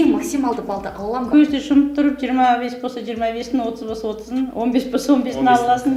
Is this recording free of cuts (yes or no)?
yes